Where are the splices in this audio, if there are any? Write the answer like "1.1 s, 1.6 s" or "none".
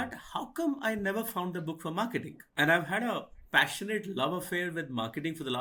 none